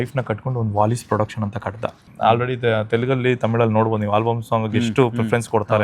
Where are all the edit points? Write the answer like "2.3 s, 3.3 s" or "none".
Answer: 2.1 s